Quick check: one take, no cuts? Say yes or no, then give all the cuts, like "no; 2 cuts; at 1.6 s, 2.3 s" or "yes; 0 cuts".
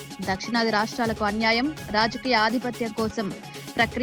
yes; 0 cuts